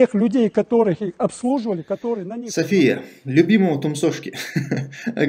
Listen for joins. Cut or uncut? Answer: cut